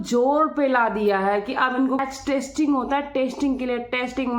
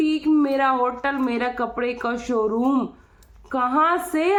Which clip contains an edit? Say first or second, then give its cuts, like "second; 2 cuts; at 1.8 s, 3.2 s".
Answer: first; 1 cut; at 2.0 s